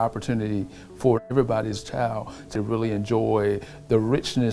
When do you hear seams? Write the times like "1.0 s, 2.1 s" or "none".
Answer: 1.2 s, 2.5 s